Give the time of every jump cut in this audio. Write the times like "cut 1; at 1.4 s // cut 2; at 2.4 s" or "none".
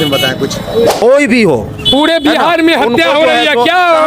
cut 1; at 0.9 s